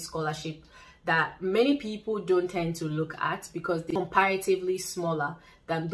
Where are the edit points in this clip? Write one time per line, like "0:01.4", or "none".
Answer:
0:03.8